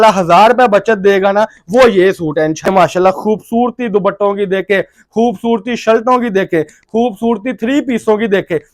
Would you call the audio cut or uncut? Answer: cut